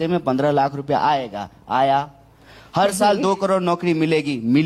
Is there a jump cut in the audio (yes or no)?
no